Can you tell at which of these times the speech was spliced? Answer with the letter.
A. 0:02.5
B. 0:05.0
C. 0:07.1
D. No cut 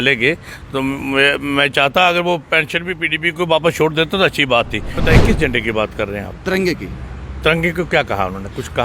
B